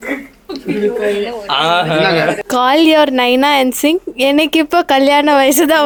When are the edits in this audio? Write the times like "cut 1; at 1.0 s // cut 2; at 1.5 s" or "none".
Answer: none